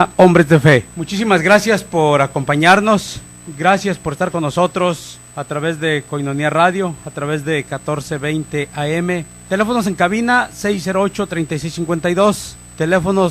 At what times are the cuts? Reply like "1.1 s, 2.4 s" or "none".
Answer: 6.6 s